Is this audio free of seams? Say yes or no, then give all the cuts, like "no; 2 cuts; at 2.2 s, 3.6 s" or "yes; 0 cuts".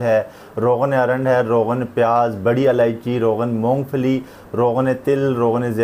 yes; 0 cuts